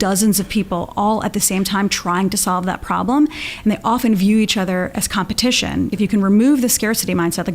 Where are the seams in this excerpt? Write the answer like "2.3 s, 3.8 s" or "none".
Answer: 5.9 s